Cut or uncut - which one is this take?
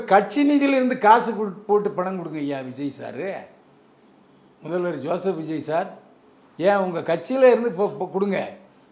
uncut